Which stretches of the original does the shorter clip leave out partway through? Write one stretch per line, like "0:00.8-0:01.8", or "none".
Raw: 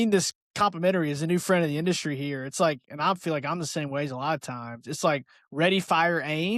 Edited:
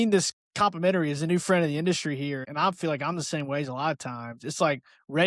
0:02.4-0:02.9